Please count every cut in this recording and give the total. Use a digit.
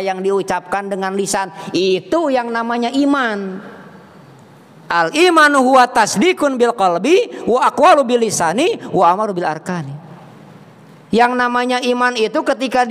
0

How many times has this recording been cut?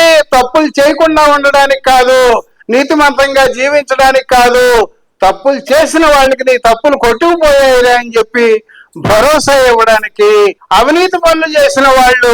1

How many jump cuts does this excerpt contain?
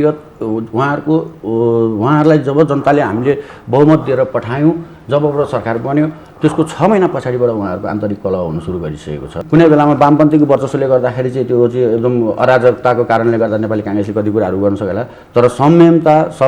1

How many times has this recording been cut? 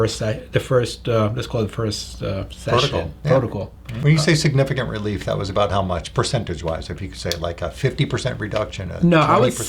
1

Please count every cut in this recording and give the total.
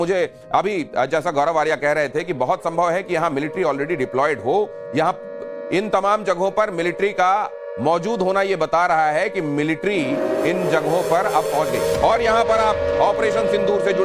0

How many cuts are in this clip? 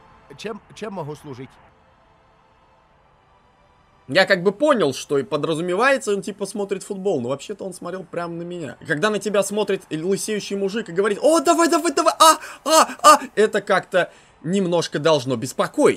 2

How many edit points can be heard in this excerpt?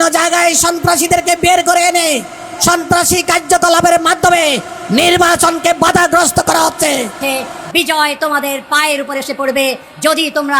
1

